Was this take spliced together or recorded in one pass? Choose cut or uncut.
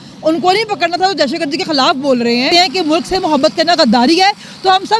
cut